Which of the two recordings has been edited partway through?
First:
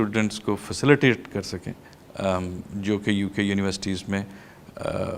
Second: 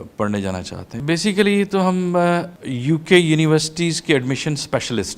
second; 2 cuts; at 0.9 s, 2.6 s

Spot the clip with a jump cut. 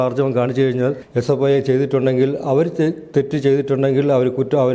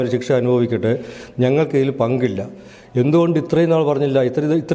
first; 1 cut; at 1.1 s

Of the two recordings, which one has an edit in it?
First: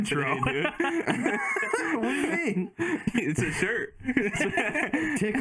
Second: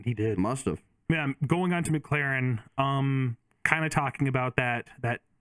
second; 1 cut; at 1.1 s

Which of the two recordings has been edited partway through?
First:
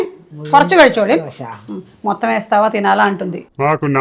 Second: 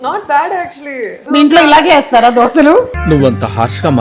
second; 1 cut; at 1.1 s

